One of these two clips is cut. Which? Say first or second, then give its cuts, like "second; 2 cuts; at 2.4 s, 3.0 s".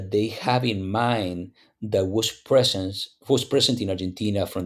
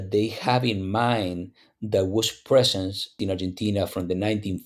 second; 1 cut; at 3.2 s